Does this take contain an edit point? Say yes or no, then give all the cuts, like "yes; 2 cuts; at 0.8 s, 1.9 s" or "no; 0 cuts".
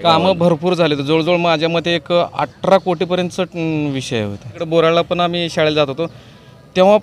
yes; 1 cut; at 4.6 s